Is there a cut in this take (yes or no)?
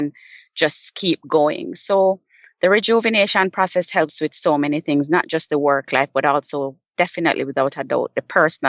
no